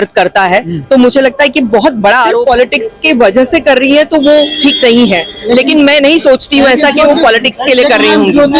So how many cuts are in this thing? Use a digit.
1